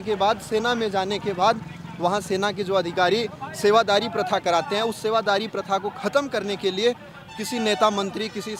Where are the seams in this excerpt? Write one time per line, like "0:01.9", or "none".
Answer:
none